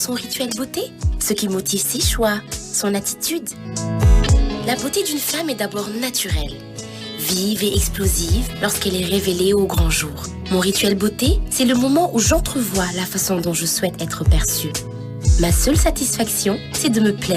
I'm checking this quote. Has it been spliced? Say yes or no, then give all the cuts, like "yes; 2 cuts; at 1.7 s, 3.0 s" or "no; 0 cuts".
yes; 1 cut; at 4.2 s